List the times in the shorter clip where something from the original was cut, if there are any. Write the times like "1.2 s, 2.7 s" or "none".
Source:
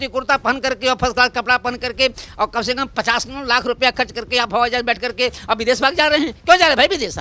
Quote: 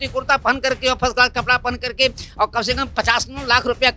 none